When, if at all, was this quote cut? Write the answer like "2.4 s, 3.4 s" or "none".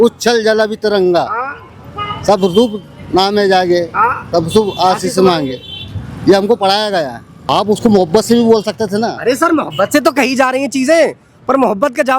7.5 s